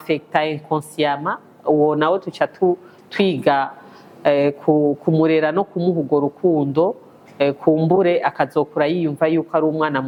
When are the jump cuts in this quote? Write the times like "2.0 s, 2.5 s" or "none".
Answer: none